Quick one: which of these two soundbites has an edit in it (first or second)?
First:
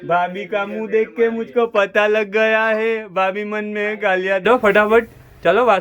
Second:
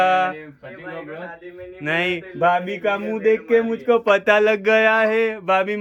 first